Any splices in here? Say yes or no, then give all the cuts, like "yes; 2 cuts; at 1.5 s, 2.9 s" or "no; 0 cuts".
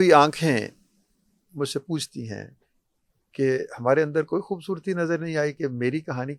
no; 0 cuts